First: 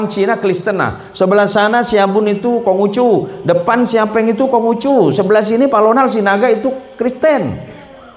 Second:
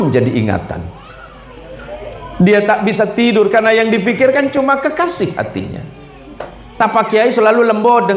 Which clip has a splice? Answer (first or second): second